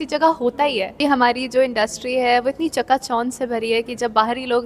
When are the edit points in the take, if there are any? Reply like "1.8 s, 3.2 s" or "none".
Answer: 0.9 s

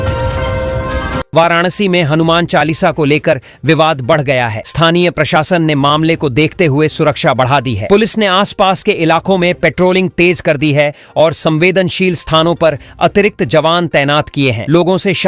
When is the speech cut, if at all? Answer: 1.2 s

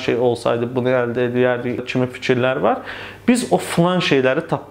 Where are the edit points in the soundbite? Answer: 1.9 s

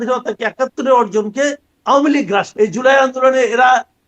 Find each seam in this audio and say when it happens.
2.5 s

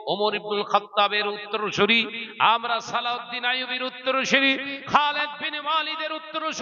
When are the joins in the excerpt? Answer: none

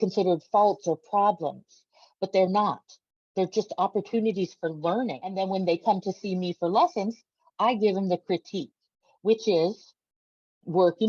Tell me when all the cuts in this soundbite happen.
5.4 s

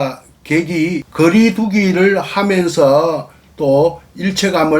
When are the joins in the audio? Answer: 1.0 s

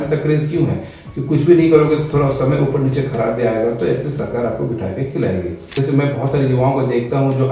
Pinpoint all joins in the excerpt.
5.7 s

